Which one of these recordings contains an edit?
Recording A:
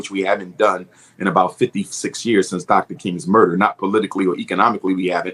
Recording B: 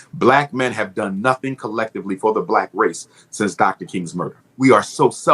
B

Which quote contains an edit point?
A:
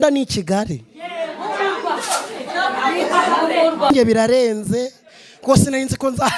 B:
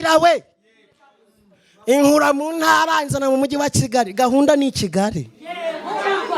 A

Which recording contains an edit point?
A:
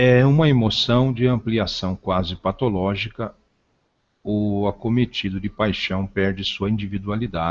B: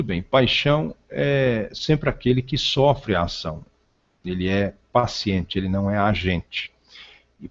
A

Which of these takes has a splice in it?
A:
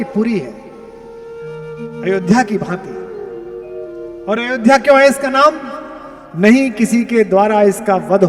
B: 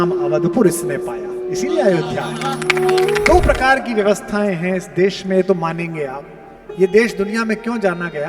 B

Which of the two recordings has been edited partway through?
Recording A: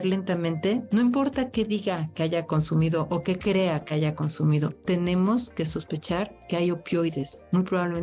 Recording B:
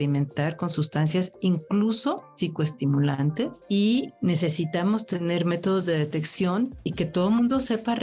B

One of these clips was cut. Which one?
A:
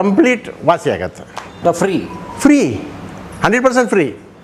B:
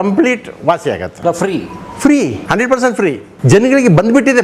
B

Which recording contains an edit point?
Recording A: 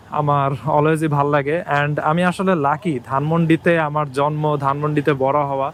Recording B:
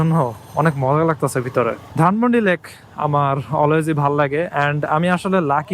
B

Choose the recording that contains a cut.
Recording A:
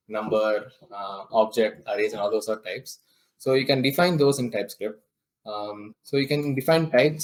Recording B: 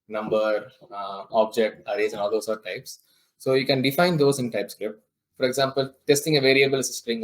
B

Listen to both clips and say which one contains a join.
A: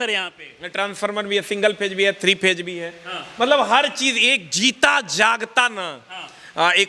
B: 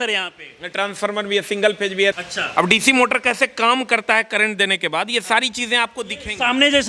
B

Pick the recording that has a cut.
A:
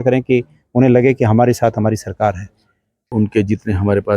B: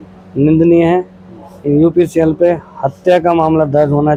A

